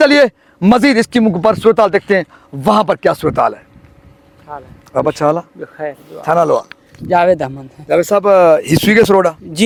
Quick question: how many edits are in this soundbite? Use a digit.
0